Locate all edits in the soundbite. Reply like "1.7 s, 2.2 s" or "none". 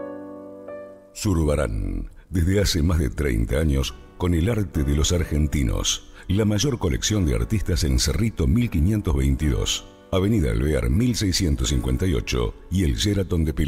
0.9 s